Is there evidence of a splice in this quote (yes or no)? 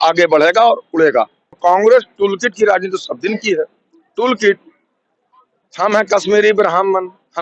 yes